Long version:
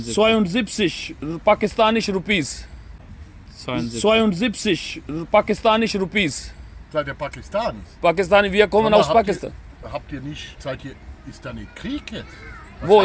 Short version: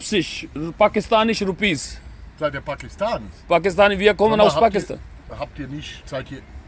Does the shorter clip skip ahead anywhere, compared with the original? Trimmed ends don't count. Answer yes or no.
yes